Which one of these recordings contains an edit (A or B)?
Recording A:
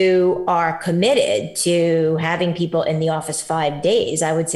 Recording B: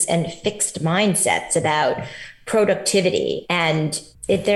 B